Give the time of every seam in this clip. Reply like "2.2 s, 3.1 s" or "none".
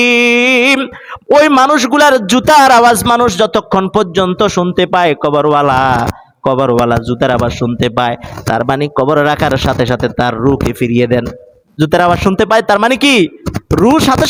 none